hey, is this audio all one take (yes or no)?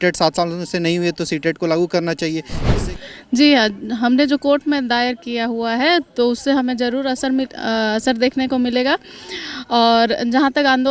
no